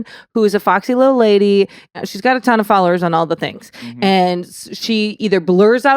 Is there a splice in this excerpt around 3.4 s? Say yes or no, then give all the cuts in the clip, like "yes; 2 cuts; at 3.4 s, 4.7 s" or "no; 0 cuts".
no; 1 cut; at 1.9 s